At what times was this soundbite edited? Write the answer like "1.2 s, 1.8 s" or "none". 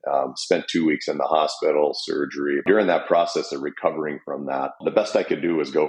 2.6 s, 4.8 s